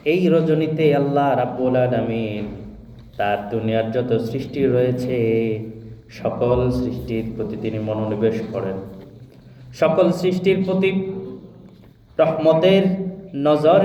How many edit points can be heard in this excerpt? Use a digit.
0